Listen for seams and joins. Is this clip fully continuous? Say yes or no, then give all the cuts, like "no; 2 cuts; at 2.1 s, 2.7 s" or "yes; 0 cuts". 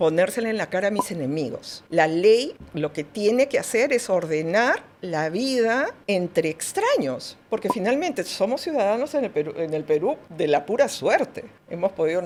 yes; 0 cuts